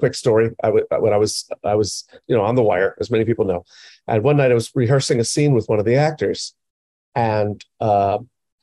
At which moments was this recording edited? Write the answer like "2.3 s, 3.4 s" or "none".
2.1 s